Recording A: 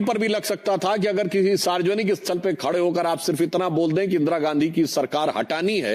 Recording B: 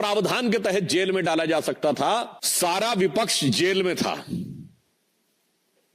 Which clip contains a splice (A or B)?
B